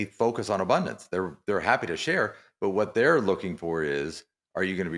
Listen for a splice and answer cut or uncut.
uncut